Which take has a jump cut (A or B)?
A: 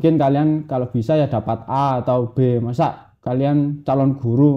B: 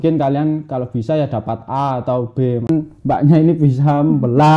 B